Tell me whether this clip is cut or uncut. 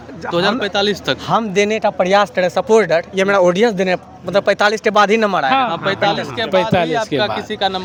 uncut